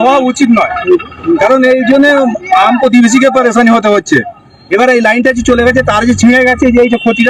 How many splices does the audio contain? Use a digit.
0